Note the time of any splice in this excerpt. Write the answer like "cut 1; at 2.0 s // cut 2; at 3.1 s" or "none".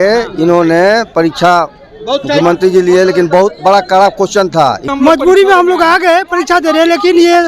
cut 1; at 4.8 s